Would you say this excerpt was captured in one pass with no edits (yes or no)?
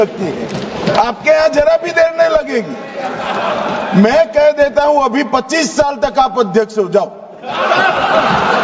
yes